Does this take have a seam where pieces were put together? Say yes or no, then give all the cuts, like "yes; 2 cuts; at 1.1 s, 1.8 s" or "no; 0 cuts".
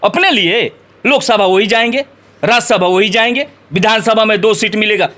no; 0 cuts